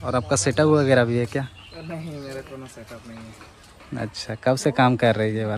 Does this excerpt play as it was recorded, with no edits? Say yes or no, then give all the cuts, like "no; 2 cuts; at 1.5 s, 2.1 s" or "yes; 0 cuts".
yes; 0 cuts